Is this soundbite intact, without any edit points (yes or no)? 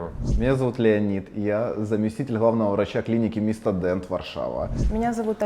yes